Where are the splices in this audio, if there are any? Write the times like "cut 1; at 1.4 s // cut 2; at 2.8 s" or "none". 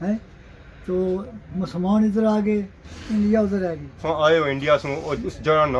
cut 1; at 4.0 s